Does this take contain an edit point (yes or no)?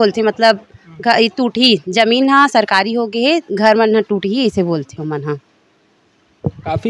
no